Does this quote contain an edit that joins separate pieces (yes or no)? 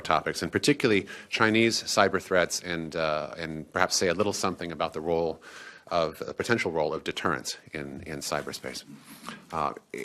no